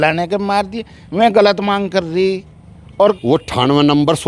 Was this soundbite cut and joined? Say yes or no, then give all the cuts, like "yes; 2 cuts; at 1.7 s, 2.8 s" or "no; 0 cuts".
yes; 1 cut; at 3.2 s